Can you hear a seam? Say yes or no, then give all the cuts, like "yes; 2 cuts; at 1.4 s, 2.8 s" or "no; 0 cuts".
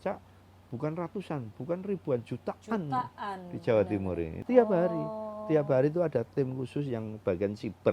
yes; 1 cut; at 4.3 s